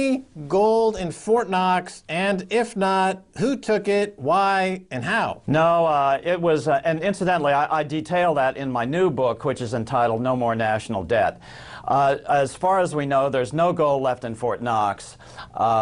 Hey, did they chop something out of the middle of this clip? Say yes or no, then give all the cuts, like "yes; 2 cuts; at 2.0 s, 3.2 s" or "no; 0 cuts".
yes; 1 cut; at 9.7 s